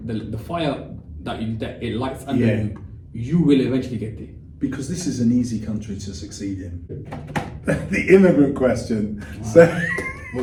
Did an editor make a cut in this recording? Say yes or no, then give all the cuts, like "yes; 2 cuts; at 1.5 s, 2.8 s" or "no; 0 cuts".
no; 0 cuts